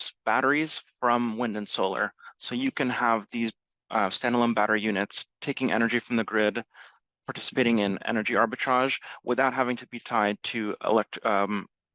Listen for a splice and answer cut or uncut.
uncut